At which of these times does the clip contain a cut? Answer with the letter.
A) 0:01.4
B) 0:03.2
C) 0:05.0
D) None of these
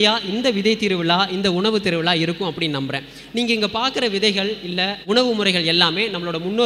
C